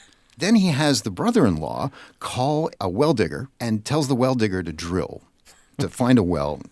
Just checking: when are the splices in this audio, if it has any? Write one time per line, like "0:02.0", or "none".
0:02.7
0:03.5